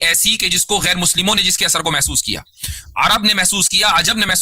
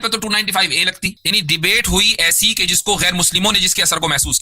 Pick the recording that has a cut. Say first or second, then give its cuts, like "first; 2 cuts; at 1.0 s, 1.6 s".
second; 1 cut; at 1.2 s